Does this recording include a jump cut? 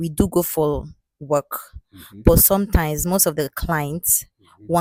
no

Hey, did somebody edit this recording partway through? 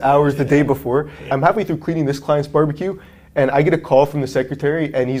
yes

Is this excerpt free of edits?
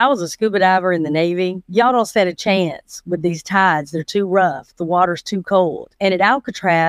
no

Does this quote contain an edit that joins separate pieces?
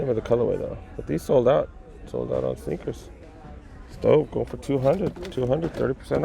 no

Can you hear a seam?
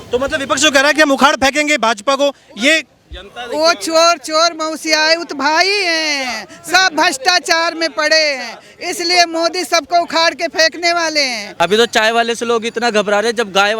yes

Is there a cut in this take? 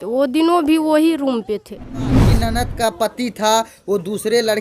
yes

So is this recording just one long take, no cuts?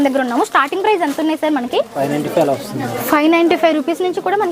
no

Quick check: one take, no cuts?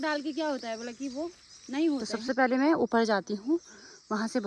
no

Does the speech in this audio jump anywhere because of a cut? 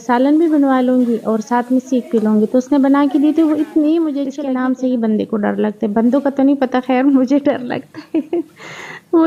yes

